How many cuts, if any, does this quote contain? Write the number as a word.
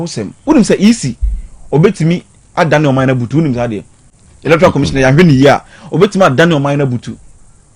zero